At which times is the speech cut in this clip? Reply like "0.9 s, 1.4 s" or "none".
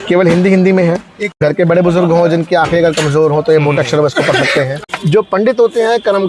4.9 s

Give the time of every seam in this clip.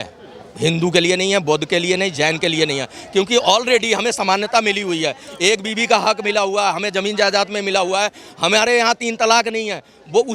none

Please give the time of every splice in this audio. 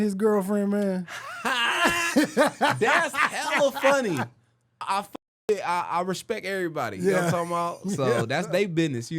4.8 s

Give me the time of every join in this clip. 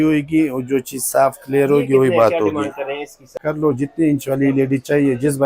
3.4 s

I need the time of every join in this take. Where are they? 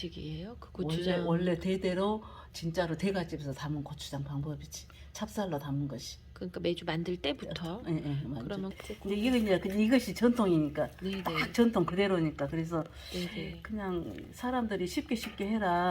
8.7 s

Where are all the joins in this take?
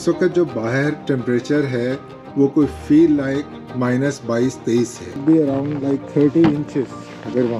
5.2 s

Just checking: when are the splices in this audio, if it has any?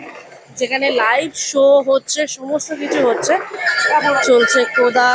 3.7 s

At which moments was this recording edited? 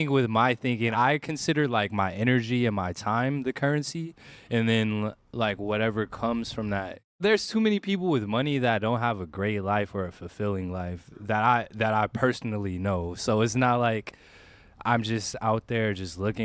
0.9 s, 7.2 s

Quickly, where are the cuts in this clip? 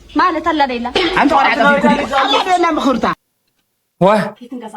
3.2 s

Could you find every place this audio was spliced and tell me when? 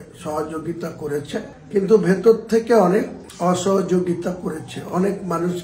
none

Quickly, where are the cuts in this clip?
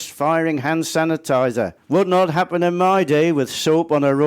1.8 s

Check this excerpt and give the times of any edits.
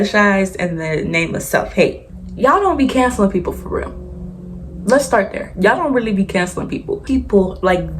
2.0 s, 6.9 s

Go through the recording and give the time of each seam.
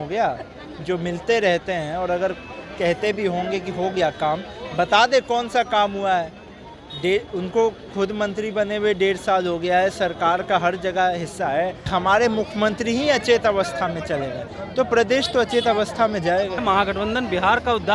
11.8 s, 16.6 s

